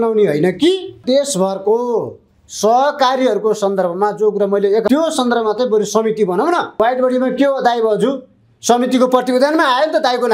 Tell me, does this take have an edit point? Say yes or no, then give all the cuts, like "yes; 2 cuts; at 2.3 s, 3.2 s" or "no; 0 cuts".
yes; 3 cuts; at 1.0 s, 4.9 s, 6.8 s